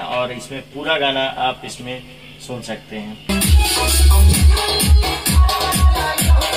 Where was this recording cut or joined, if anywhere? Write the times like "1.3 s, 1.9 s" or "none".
3.3 s